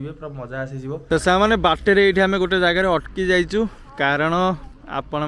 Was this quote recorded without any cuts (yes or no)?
no